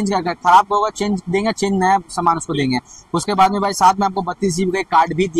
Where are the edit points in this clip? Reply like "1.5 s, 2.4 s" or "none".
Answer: none

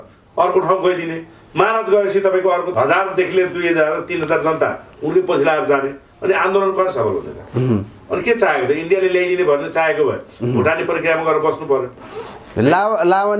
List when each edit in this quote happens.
none

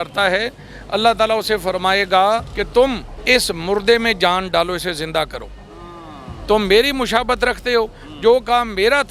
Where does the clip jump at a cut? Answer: none

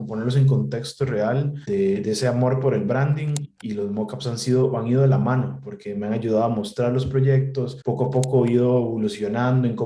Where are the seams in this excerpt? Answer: 1.6 s, 3.5 s, 7.8 s

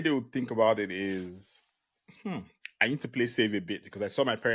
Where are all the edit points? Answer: none

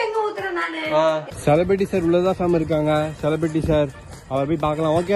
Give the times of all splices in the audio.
1.3 s

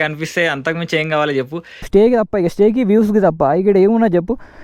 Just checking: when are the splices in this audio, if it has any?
1.9 s

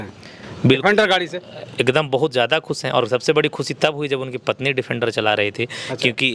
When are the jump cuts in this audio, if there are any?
none

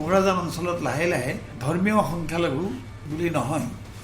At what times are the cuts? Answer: 1.5 s, 2.9 s

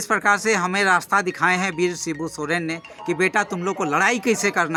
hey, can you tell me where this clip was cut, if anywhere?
none

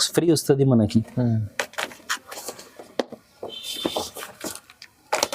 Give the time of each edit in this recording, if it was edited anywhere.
none

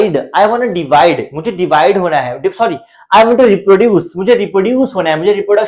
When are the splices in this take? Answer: none

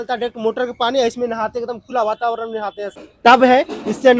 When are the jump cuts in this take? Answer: none

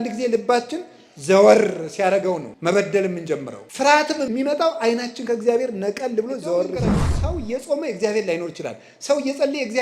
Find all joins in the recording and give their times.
2.5 s, 3.6 s, 4.3 s, 7.1 s

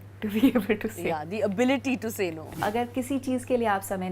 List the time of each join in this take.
1.0 s, 2.5 s

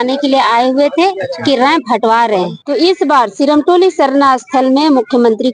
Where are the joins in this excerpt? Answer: 2.6 s

